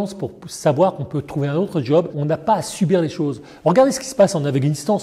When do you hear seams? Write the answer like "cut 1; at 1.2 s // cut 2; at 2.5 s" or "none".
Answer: cut 1; at 2.1 s